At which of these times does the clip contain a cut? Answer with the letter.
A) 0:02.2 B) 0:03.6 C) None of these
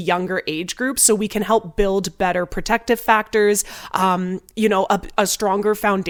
C